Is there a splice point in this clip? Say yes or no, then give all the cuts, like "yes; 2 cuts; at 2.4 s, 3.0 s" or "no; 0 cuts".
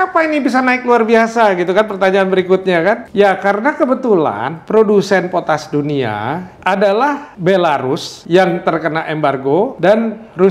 yes; 5 cuts; at 3.0 s, 6.5 s, 7.3 s, 8.1 s, 9.7 s